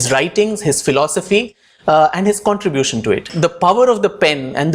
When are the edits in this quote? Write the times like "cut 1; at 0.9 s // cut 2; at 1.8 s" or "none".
cut 1; at 3.3 s